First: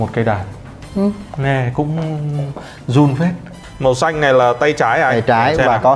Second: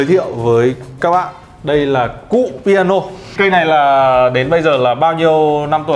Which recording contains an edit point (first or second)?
first